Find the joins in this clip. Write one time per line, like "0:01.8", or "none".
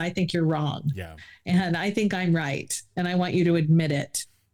none